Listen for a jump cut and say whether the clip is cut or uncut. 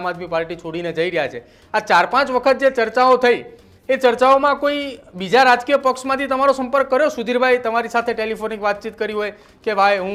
uncut